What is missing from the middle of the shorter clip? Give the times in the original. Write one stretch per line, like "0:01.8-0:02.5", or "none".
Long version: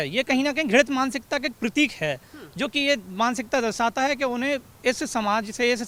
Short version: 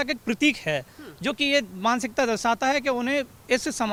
none